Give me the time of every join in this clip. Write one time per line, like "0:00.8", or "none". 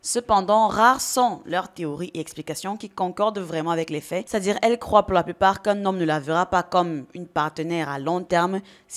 0:04.3